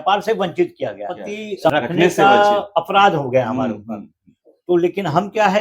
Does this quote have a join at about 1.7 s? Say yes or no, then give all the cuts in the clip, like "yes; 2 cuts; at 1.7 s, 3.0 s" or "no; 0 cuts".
yes; 1 cut; at 1.7 s